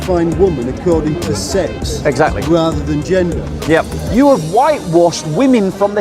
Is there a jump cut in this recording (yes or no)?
yes